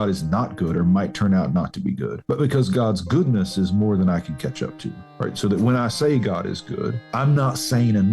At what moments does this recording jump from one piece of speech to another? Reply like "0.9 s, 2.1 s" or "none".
2.1 s, 7.0 s